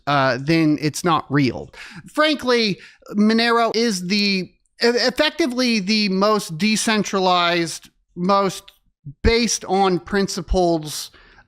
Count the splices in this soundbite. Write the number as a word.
one